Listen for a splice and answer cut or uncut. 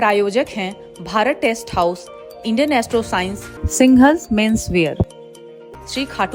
uncut